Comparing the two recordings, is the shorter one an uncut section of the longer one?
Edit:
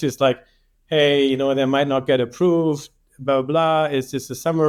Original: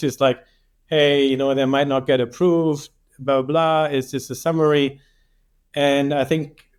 yes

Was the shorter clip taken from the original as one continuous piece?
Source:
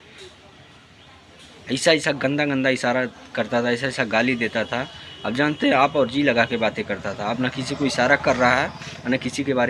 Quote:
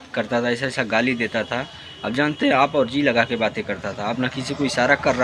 yes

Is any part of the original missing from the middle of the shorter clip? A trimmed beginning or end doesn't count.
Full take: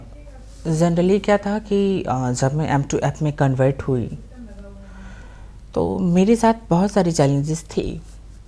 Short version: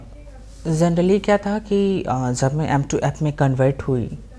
no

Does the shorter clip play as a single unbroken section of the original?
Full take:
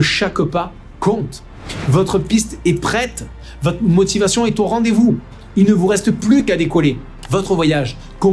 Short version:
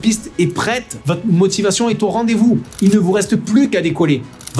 no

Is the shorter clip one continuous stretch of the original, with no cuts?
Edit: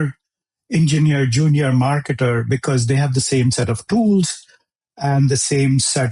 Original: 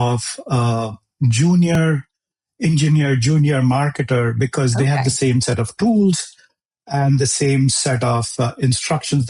yes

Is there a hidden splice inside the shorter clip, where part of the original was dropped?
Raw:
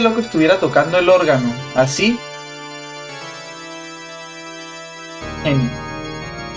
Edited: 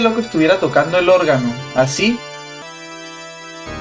yes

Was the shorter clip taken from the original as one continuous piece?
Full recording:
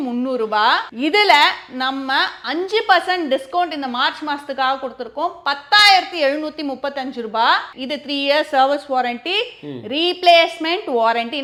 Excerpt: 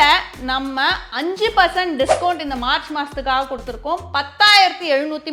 yes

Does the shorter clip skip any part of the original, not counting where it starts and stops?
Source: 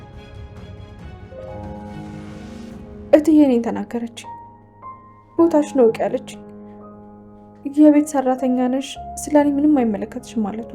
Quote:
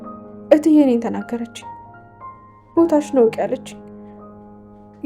no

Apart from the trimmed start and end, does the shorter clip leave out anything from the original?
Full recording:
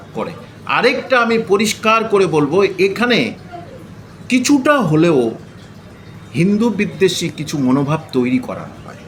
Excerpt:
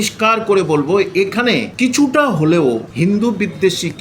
yes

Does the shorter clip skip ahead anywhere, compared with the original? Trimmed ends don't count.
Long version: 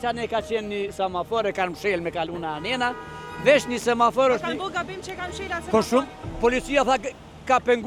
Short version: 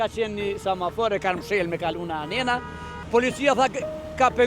yes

